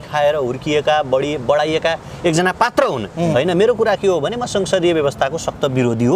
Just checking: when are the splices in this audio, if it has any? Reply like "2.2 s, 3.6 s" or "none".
3.3 s